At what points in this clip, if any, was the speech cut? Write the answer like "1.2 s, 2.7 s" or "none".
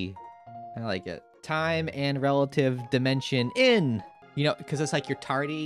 1.3 s, 4.2 s